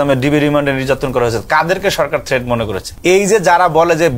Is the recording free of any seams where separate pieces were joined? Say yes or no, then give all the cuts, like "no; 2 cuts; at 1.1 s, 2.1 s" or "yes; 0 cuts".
no; 1 cut; at 2.8 s